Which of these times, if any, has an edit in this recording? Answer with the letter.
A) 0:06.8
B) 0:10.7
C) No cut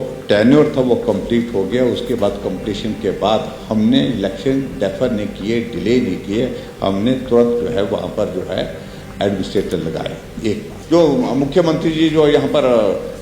B